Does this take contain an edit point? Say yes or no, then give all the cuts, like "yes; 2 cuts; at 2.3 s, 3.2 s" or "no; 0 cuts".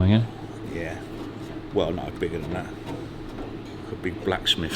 yes; 2 cuts; at 1.5 s, 3.6 s